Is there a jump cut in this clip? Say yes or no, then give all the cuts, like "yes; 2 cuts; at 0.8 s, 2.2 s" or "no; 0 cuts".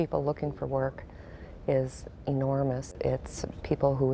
yes; 1 cut; at 2.9 s